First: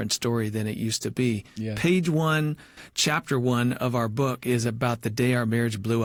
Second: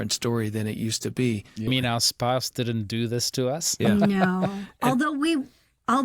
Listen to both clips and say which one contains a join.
second; 1 cut; at 1.7 s

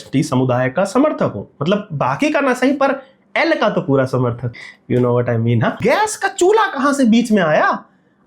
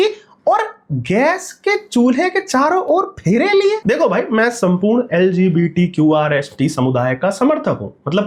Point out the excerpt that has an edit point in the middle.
first; 2 cuts; at 4.6 s, 5.8 s

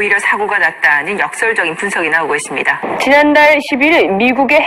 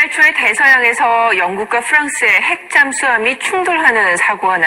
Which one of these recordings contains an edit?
first; 1 cut; at 2.8 s

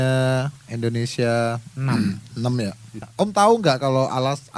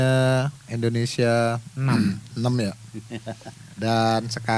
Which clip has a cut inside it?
first; 1 cut; at 3.1 s

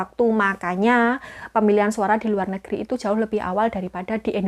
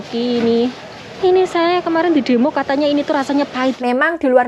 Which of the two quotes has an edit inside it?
second; 2 cuts; at 1.0 s, 3.8 s

